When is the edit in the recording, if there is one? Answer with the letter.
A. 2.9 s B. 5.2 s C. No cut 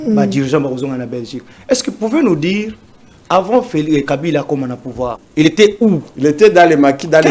B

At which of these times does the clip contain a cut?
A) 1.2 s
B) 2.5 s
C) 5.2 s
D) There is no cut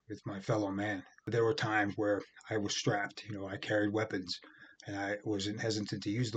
A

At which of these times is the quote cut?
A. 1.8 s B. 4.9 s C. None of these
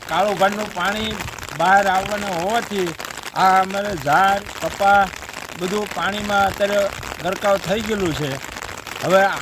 B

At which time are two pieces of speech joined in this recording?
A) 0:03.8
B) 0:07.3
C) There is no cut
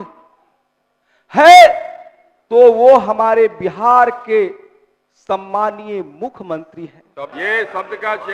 B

